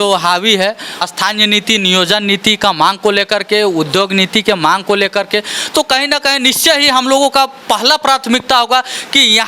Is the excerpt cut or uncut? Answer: cut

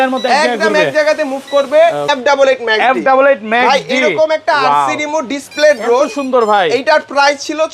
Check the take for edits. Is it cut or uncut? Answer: cut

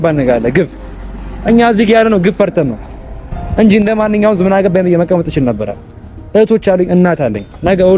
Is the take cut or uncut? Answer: uncut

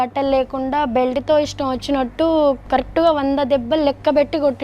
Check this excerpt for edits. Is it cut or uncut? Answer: uncut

